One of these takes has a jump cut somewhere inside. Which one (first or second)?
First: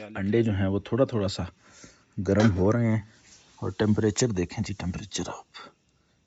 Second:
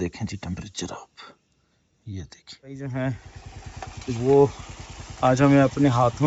second